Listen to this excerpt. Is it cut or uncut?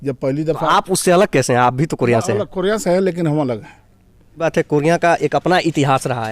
cut